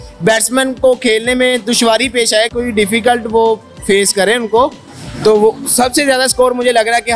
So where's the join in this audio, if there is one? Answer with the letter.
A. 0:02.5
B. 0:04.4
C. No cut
C